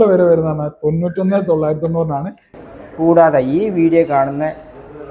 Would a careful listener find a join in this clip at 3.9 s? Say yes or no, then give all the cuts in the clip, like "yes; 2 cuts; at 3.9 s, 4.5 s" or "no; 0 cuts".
no; 1 cut; at 2.5 s